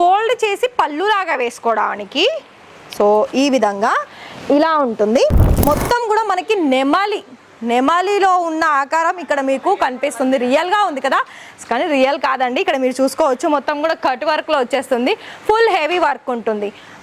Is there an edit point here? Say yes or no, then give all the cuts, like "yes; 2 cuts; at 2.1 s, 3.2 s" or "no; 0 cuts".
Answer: yes; 1 cut; at 5.5 s